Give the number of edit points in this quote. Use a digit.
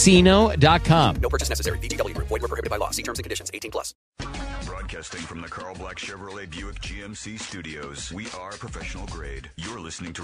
1